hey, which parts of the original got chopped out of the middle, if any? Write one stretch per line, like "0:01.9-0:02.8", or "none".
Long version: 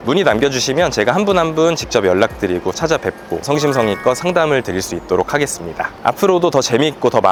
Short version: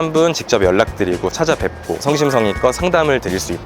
none